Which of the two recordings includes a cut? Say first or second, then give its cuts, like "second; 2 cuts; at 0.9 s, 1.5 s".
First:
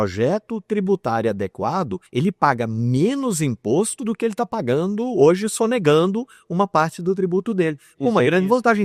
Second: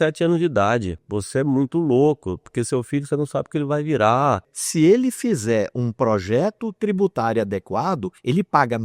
second; 2 cuts; at 1.0 s, 4.5 s